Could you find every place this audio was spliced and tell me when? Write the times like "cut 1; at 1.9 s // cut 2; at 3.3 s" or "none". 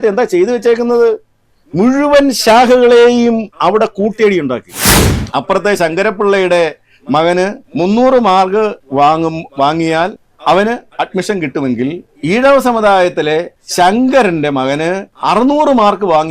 cut 1; at 4.9 s // cut 2; at 7.6 s // cut 3; at 8.8 s // cut 4; at 10.3 s // cut 5; at 12.1 s // cut 6; at 13.6 s // cut 7; at 15.1 s